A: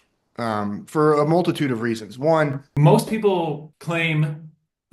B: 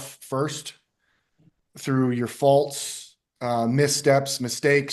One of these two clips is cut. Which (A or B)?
A